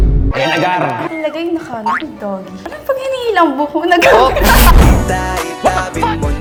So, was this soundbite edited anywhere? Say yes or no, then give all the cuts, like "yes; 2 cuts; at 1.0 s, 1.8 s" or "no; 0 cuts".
no; 0 cuts